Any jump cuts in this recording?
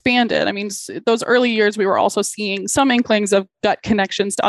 yes; 1 cut; at 2.6 s

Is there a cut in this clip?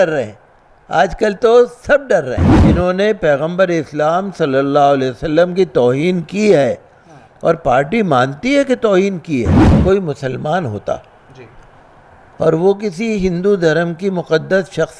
yes; 2 cuts; at 2.6 s, 9.6 s

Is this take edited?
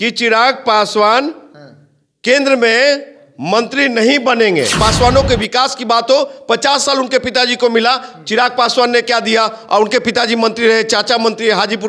yes; 1 cut; at 4.8 s

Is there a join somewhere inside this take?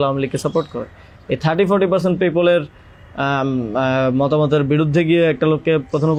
no; 0 cuts

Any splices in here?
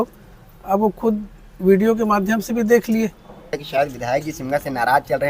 yes; 1 cut; at 3.5 s

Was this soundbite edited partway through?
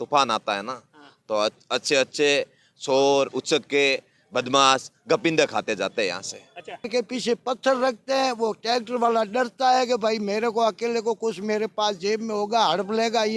yes; 1 cut; at 6.9 s

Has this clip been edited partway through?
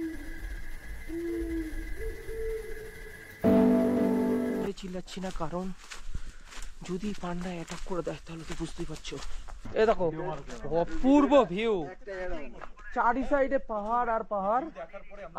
yes; 2 cuts; at 4.6 s, 9.6 s

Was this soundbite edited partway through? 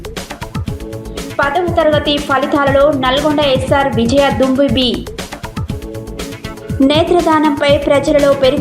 yes; 1 cut; at 0.9 s

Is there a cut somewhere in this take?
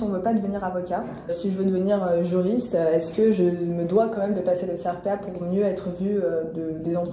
yes; 1 cut; at 1.3 s

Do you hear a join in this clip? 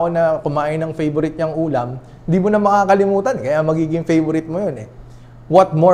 no; 0 cuts

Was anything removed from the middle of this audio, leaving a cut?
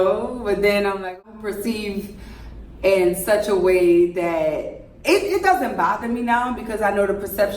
yes; 1 cut; at 1.2 s

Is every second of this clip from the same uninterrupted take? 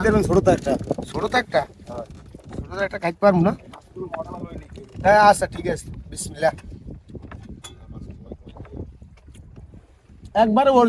yes; 0 cuts

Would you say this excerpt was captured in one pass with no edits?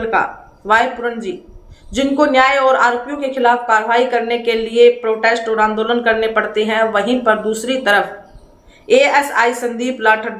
yes; 0 cuts

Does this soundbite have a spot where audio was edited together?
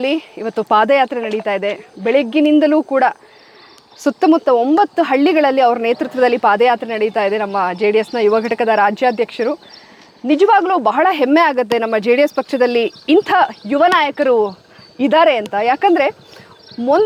no; 0 cuts

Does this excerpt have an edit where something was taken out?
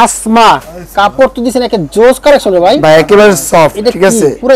no; 0 cuts

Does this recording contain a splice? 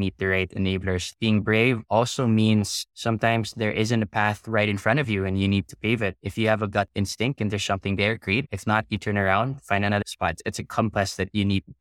yes; 2 cuts; at 1.1 s, 10.3 s

